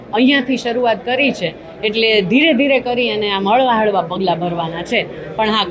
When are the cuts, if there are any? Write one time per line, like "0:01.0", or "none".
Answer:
none